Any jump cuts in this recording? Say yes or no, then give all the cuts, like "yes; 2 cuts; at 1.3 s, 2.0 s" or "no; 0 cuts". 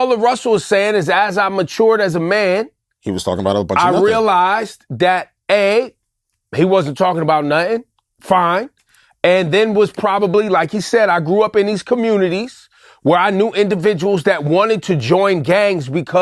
no; 0 cuts